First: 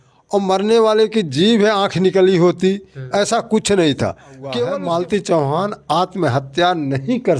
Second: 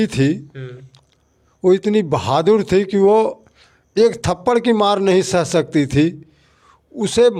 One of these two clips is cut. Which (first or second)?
first